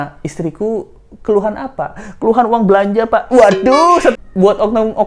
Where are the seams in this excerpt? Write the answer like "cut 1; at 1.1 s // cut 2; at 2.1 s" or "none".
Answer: cut 1; at 4.2 s